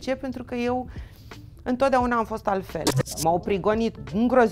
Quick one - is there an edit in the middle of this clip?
yes; 1 cut; at 3.0 s

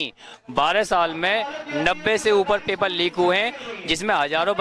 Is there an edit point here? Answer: no; 0 cuts

